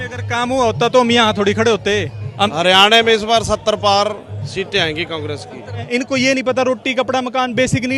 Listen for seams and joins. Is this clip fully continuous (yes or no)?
no